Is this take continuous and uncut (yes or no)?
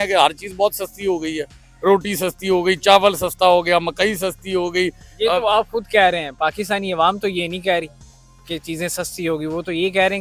yes